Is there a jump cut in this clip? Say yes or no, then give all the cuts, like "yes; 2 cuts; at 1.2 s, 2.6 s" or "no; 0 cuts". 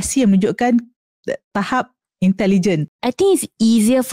yes; 1 cut; at 2.9 s